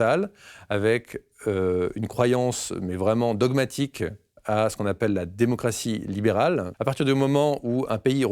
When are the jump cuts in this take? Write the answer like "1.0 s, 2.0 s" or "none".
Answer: 6.7 s